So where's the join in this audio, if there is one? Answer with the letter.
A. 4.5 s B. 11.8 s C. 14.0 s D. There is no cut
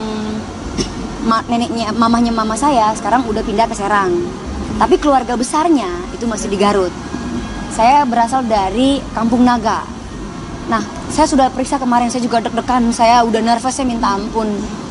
B